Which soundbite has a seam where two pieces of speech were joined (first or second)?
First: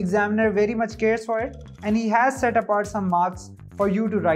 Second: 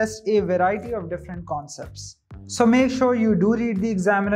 second